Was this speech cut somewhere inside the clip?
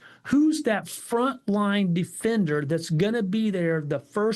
no; 0 cuts

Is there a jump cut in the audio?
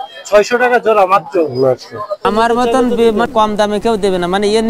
yes; 2 cuts; at 2.2 s, 3.3 s

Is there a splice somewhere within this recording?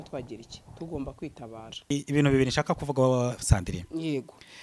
yes; 1 cut; at 1.9 s

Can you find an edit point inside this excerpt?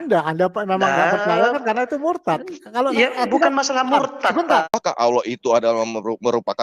yes; 1 cut; at 4.7 s

